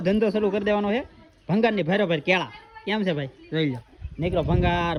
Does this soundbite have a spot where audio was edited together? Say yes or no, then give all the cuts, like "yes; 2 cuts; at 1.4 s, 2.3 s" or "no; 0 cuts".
no; 0 cuts